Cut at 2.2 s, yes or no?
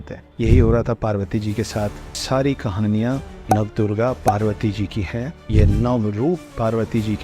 yes